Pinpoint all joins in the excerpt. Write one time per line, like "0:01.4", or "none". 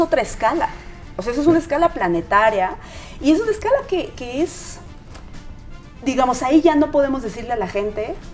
none